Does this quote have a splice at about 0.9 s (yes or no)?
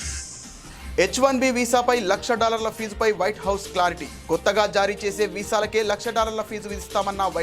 yes